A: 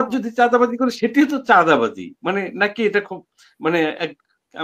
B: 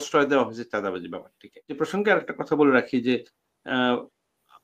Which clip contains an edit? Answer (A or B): B